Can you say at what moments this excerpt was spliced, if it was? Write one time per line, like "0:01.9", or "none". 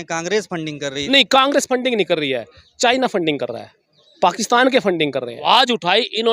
0:01.0
0:05.5